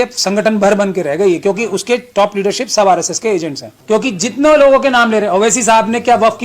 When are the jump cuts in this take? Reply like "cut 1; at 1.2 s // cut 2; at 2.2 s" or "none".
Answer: cut 1; at 4.0 s